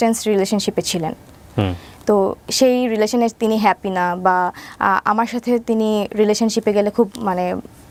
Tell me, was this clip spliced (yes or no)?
no